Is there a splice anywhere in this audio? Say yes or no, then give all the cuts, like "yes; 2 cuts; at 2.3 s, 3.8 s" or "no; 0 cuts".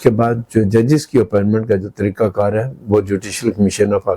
no; 0 cuts